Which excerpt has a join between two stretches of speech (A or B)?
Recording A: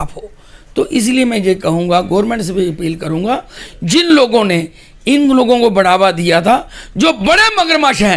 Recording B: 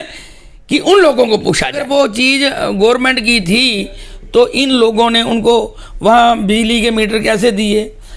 B